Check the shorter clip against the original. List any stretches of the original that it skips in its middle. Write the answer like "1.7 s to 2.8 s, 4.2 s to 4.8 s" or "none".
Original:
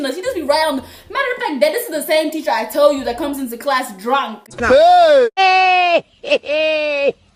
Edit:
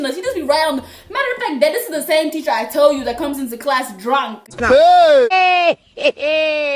5.3 s to 5.6 s